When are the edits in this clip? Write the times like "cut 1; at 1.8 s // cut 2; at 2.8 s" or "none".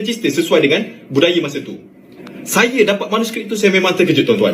cut 1; at 2.2 s